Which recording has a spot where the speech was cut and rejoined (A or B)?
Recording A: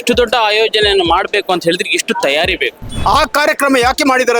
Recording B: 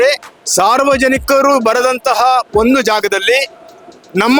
A